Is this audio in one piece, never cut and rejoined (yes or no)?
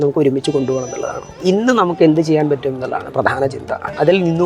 no